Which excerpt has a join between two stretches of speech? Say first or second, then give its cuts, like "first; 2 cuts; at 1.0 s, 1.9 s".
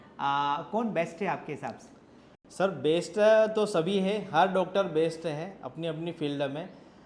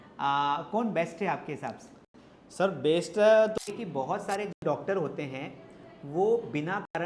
second; 1 cut; at 3.6 s